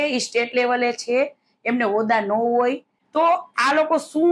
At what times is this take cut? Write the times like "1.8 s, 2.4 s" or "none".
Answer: 2.9 s